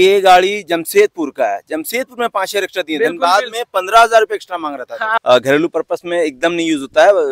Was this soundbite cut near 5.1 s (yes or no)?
yes